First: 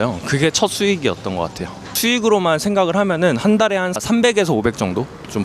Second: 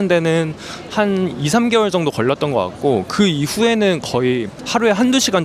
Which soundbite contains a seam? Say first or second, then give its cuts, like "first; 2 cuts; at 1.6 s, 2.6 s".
first; 1 cut; at 2.0 s